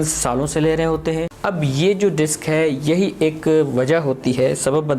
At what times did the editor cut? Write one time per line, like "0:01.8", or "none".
0:01.3